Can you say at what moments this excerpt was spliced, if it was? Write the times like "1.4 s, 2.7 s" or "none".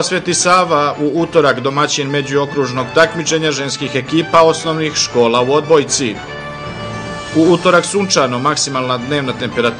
none